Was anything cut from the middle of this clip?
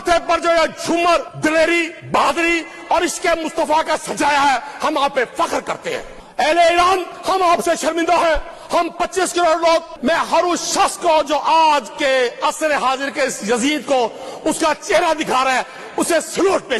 yes; 6 cuts; at 1.3 s, 2.0 s, 6.1 s, 7.1 s, 8.5 s, 9.9 s

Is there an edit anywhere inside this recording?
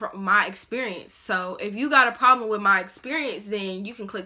no; 0 cuts

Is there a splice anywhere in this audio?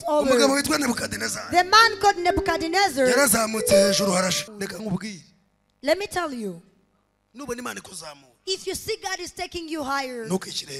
yes; 1 cut; at 4.5 s

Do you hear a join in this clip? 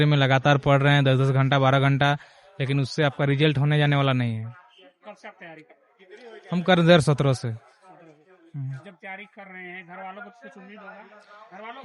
no; 0 cuts

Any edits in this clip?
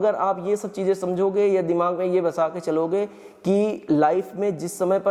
no; 0 cuts

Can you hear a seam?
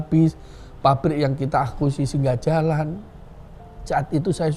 no; 0 cuts

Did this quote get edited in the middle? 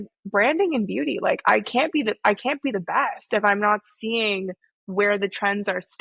no; 0 cuts

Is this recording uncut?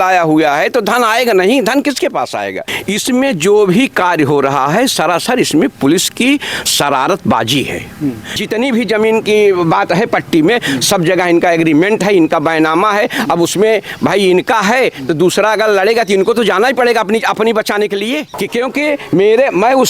no; 3 cuts; at 2.7 s, 8.4 s, 18.3 s

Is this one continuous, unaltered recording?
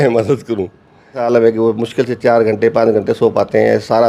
no; 1 cut; at 1.2 s

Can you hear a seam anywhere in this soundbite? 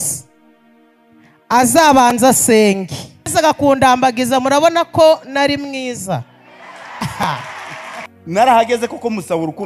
yes; 2 cuts; at 3.3 s, 8.1 s

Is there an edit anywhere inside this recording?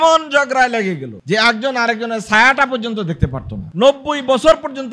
yes; 1 cut; at 3.6 s

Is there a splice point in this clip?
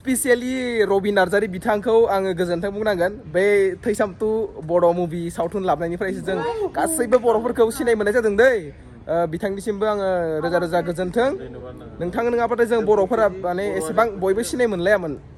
no; 0 cuts

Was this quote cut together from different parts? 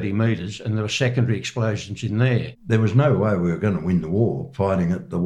yes; 1 cut; at 2.5 s

